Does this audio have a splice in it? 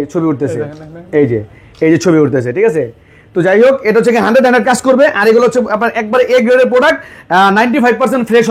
no; 0 cuts

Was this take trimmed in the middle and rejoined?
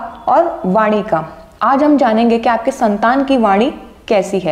no; 0 cuts

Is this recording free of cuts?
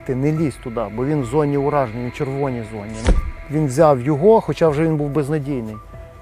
no; 1 cut; at 2.9 s

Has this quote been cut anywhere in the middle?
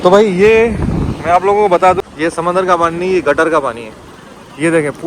yes; 1 cut; at 2.0 s

